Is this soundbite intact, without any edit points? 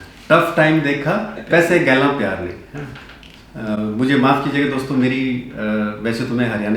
no; 1 cut; at 1.4 s

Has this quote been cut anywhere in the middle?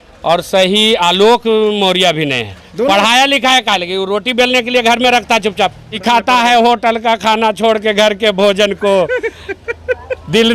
yes; 1 cut; at 5.9 s

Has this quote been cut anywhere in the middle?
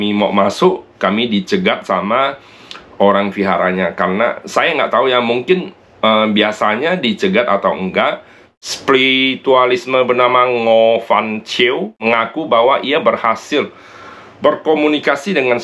yes; 2 cuts; at 8.5 s, 12.0 s

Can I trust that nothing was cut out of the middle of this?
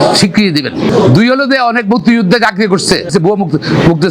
yes; 0 cuts

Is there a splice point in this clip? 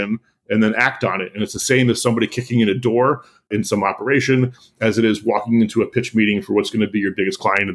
yes; 1 cut; at 3.5 s

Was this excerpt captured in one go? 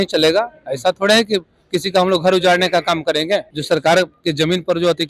no; 1 cut; at 3.5 s

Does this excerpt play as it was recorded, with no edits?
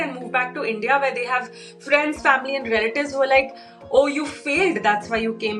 yes; 0 cuts

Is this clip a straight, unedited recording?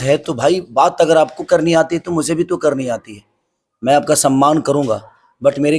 yes; 0 cuts

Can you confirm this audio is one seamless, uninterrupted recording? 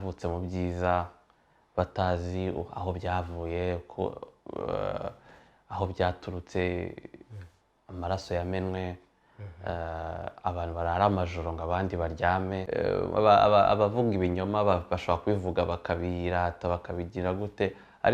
no; 1 cut; at 12.6 s

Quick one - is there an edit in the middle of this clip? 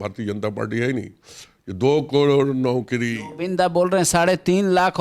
no; 0 cuts

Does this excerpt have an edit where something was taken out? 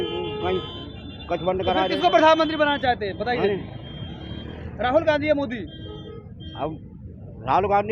no; 0 cuts

